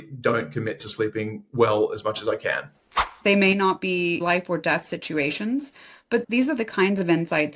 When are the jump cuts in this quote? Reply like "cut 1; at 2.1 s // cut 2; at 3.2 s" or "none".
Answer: cut 1; at 2.8 s // cut 2; at 4.2 s